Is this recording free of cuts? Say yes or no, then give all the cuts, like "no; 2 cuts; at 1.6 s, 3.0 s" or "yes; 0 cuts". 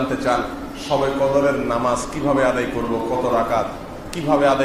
yes; 0 cuts